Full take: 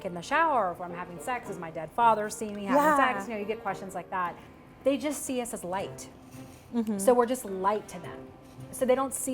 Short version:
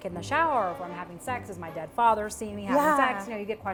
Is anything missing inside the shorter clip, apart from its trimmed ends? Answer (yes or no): no